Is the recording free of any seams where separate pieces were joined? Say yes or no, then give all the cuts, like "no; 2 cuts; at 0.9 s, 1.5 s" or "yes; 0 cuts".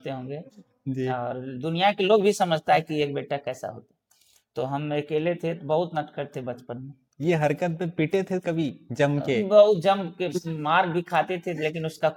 yes; 0 cuts